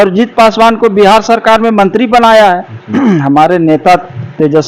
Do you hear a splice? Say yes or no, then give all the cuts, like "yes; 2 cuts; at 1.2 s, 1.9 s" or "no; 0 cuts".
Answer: yes; 1 cut; at 2.8 s